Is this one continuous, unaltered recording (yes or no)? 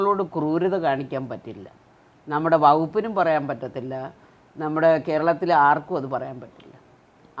yes